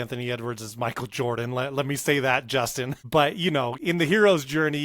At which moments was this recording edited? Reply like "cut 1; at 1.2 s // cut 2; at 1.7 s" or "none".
cut 1; at 2.9 s // cut 2; at 3.8 s

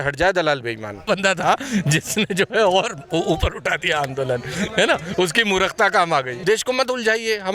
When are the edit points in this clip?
cut 1; at 1.1 s // cut 2; at 6.3 s

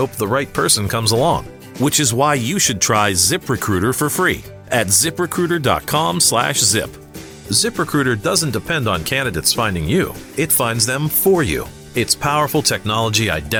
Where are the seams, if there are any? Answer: none

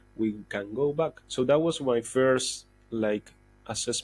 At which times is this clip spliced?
cut 1; at 1.2 s

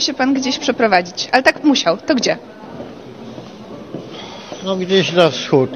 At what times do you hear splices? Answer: none

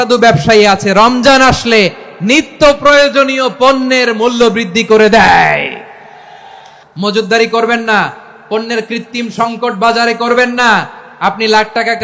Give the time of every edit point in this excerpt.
cut 1; at 6.7 s

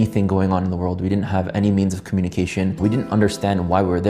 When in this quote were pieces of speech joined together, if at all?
cut 1; at 2.8 s

